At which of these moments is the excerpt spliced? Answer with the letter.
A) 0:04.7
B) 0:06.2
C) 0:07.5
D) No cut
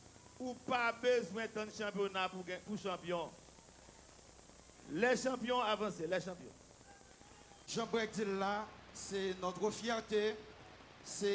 C